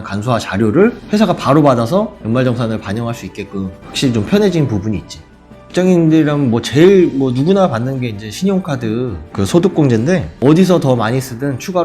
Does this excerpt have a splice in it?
yes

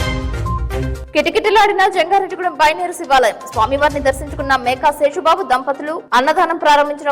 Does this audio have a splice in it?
yes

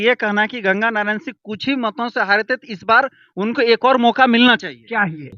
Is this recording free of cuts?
yes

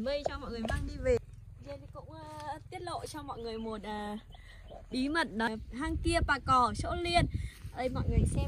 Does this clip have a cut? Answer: yes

